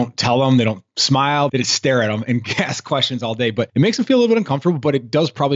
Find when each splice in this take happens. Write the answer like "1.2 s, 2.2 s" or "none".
1.5 s, 3.7 s